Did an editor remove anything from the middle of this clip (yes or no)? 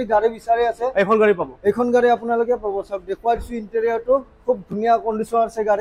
no